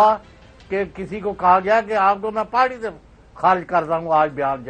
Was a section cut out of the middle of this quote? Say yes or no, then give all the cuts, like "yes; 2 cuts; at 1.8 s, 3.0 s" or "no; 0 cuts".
no; 0 cuts